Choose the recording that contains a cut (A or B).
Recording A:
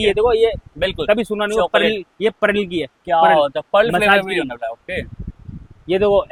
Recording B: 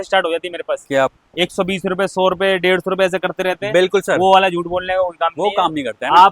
B